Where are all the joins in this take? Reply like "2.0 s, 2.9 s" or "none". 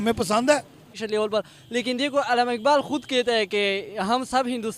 1.0 s